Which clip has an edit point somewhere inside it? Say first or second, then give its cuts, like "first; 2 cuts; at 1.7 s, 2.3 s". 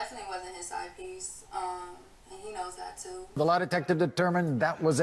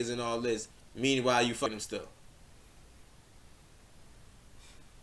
second; 1 cut; at 1.7 s